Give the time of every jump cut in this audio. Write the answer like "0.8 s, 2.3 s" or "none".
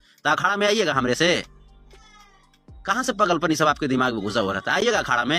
none